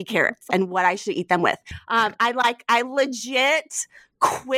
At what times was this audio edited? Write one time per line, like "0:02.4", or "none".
0:01.7

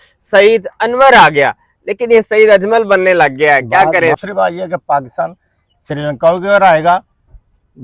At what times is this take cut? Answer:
0:04.2

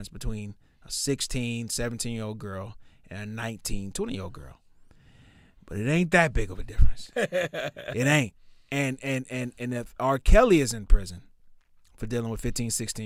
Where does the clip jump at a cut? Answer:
none

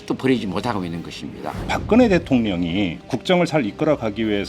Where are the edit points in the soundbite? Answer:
0:01.7
0:03.0

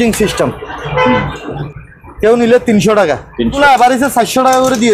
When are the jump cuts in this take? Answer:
0:01.7
0:03.6

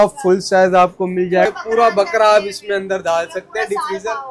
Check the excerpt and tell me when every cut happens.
0:01.5

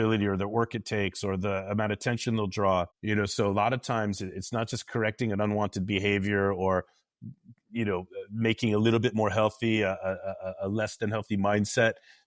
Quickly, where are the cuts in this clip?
0:03.0

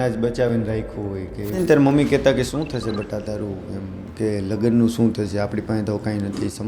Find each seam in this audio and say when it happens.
0:01.6

